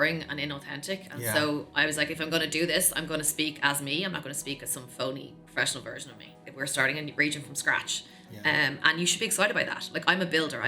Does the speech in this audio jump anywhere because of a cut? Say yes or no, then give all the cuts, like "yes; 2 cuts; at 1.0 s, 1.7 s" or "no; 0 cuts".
yes; 1 cut; at 6.4 s